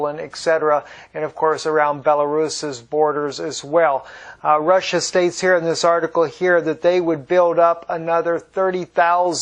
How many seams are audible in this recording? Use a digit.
1